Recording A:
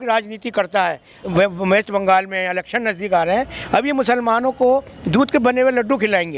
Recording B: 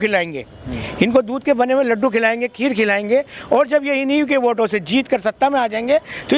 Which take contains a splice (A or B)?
A